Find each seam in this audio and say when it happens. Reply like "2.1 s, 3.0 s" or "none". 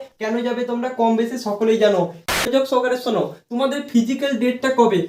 2.4 s